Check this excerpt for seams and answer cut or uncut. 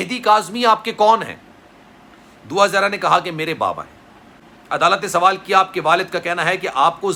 uncut